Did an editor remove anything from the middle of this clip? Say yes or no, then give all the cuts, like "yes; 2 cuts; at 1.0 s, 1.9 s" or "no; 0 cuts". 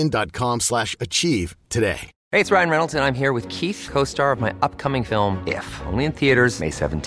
yes; 1 cut; at 2.1 s